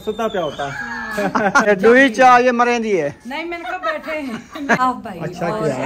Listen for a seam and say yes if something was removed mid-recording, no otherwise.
yes